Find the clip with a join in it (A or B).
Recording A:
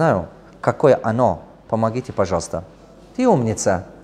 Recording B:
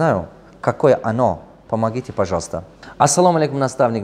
B